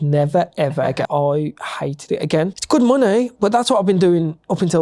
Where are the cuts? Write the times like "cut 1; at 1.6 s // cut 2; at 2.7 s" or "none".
cut 1; at 1.0 s // cut 2; at 2.6 s